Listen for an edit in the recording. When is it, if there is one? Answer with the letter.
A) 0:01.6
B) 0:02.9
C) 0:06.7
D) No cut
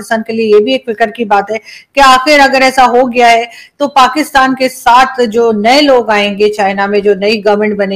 D